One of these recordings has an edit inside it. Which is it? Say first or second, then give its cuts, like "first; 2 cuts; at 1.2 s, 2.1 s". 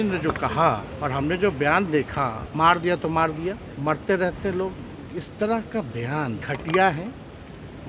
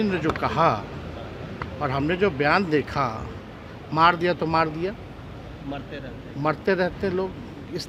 first; 4 cuts; at 0.9 s, 2.4 s, 3.7 s, 6.4 s